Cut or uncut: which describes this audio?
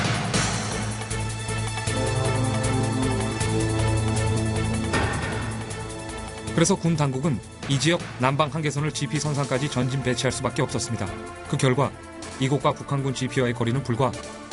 uncut